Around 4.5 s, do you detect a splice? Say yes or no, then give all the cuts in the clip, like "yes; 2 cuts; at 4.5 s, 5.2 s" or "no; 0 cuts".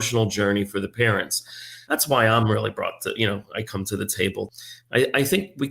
yes; 2 cuts; at 1.7 s, 4.5 s